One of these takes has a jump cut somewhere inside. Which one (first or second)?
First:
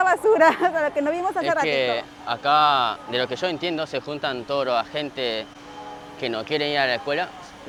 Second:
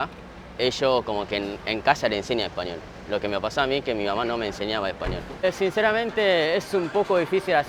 second